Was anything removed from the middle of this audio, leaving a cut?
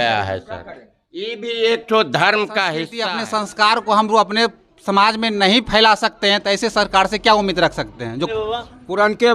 yes; 2 cuts; at 3.0 s, 8.3 s

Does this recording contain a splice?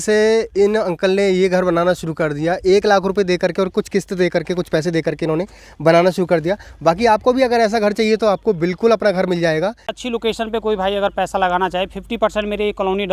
no; 0 cuts

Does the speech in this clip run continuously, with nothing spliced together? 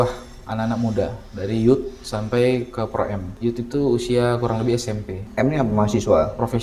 no; 2 cuts; at 3.3 s, 5.2 s

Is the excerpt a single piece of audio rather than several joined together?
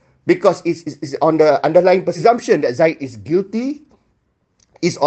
no; 1 cut; at 2.2 s

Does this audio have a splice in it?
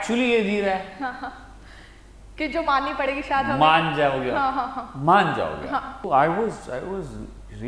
yes; 1 cut; at 6.0 s

